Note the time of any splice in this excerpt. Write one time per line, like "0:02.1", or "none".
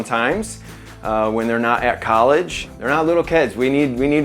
0:02.7